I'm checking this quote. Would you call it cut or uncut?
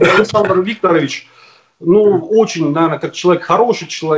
uncut